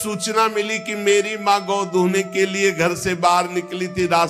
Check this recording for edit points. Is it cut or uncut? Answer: uncut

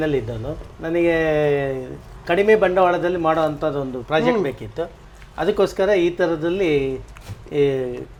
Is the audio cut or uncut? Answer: uncut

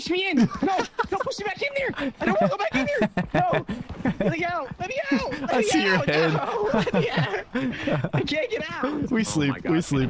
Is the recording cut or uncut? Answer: uncut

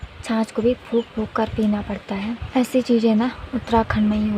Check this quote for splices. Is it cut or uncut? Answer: cut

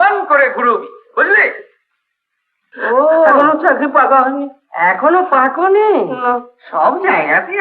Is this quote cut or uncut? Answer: cut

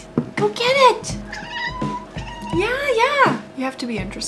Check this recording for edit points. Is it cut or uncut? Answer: cut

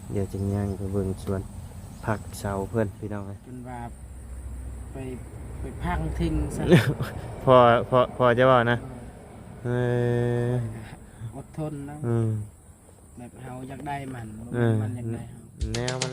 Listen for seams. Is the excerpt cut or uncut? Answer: cut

